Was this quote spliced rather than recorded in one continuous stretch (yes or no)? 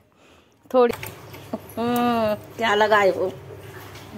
yes